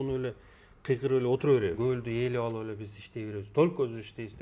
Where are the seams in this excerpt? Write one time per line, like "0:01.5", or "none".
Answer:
0:01.8